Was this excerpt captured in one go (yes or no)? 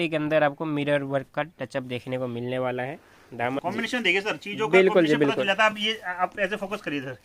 no